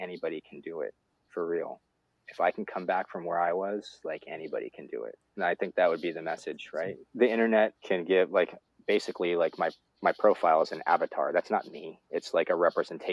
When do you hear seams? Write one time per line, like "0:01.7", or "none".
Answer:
0:05.2
0:07.0
0:07.8